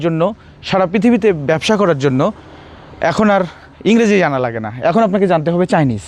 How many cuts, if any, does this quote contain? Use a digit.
0